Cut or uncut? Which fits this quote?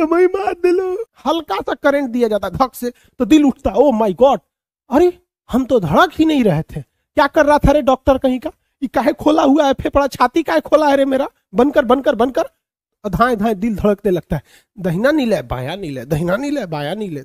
cut